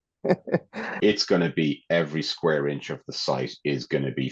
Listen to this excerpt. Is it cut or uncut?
cut